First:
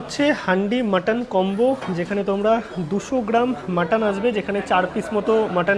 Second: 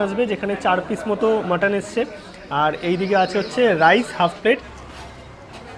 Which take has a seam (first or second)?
second